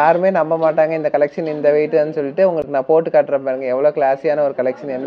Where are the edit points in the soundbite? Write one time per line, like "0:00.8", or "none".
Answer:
none